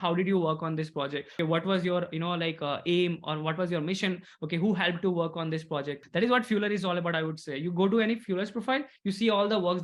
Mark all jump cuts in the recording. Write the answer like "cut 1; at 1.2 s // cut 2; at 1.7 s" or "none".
cut 1; at 1.2 s // cut 2; at 6.0 s